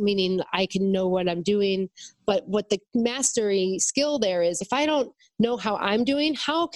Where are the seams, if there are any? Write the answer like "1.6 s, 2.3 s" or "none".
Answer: none